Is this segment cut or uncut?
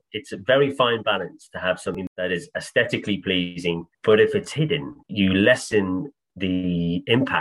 cut